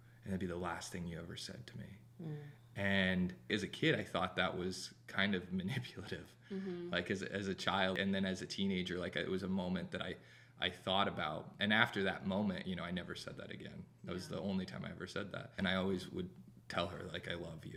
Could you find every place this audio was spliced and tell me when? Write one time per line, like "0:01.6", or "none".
none